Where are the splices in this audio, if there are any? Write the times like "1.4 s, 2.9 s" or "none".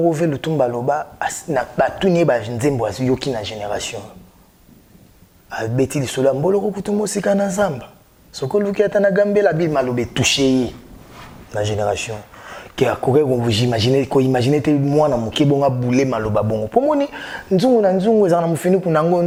none